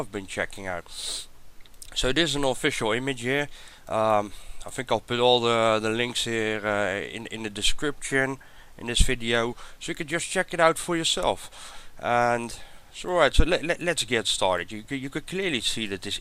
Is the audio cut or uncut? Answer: uncut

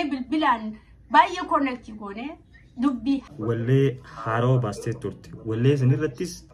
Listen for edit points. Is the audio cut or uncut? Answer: cut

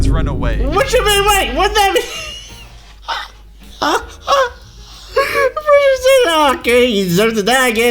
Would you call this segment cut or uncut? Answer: uncut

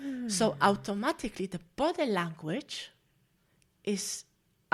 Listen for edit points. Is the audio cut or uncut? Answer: uncut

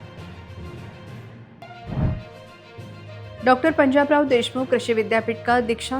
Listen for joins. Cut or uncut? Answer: cut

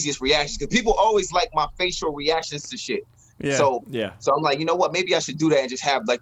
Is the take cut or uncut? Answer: uncut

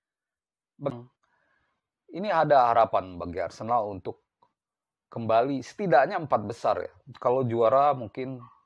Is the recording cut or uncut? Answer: cut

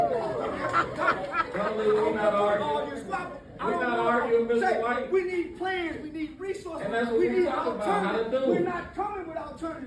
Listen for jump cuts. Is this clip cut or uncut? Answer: uncut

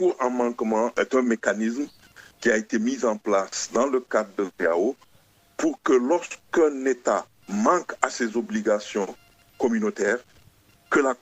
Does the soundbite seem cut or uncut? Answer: uncut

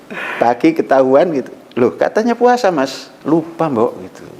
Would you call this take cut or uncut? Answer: cut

